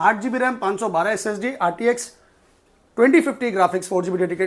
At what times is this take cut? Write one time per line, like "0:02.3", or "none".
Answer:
none